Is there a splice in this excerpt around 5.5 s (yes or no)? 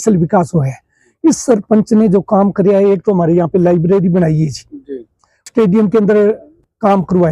yes